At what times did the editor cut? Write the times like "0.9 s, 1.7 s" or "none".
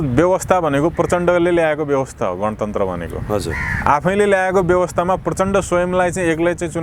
none